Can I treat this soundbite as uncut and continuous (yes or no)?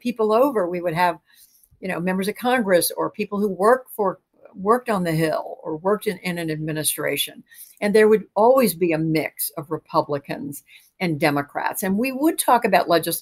yes